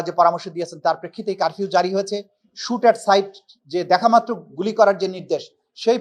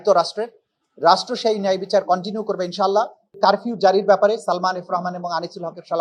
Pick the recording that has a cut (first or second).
second